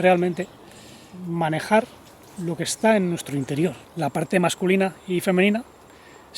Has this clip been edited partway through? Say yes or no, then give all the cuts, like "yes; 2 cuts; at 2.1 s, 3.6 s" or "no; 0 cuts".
yes; 1 cut; at 3.8 s